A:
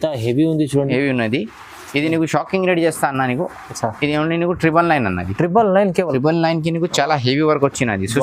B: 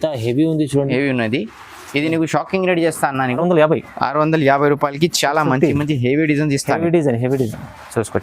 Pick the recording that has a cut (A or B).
B